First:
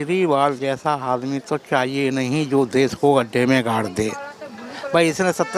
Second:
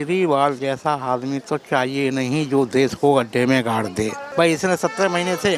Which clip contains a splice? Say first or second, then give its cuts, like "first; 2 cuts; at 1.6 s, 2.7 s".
second; 1 cut; at 4.2 s